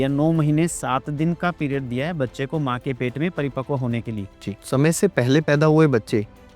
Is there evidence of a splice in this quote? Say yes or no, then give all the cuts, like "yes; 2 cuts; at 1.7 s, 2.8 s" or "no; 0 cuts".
yes; 1 cut; at 4.2 s